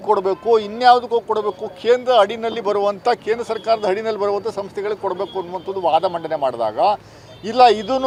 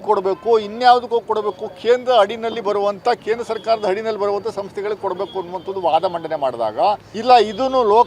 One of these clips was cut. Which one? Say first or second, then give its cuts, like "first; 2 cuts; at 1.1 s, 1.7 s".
second; 1 cut; at 7.1 s